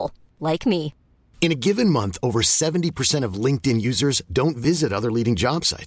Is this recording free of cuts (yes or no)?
yes